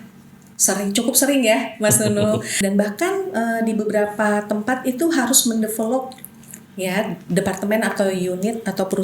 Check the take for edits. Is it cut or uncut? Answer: cut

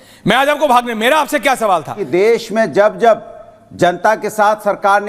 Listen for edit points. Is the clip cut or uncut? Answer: cut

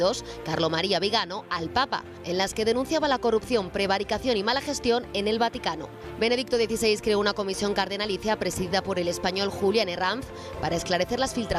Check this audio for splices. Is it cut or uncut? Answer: cut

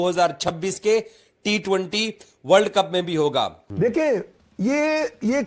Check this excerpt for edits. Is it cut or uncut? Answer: cut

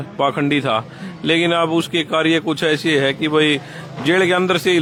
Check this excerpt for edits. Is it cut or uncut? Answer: uncut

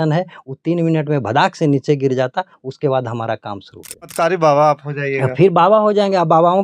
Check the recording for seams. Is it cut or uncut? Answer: cut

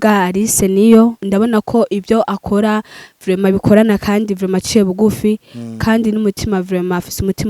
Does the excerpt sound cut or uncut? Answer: cut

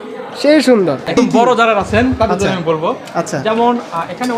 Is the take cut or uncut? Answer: cut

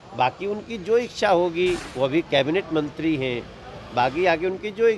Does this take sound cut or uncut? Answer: cut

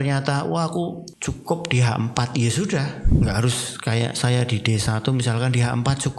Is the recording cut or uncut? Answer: cut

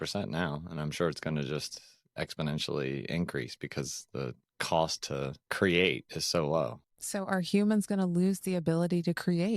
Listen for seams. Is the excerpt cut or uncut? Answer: cut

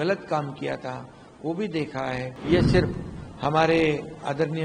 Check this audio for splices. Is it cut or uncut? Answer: cut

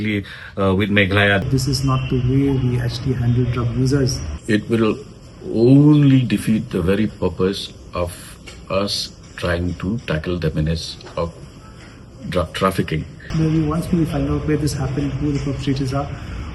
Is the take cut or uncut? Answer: cut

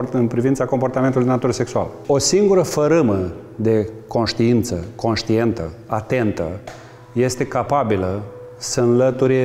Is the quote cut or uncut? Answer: cut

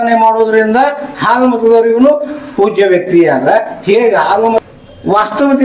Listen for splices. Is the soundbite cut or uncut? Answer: cut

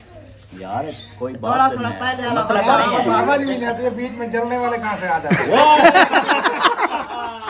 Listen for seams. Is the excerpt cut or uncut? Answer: uncut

